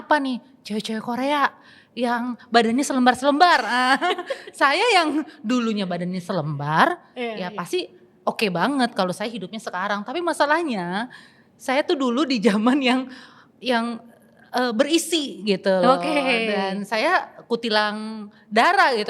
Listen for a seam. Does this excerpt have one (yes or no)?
no